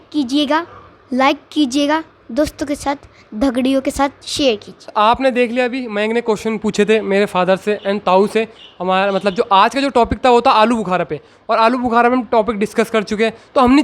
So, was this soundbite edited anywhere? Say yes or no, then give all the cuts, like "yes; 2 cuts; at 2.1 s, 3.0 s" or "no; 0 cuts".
no; 0 cuts